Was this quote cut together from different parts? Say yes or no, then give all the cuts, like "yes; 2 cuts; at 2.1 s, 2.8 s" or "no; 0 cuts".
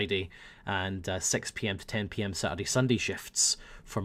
no; 0 cuts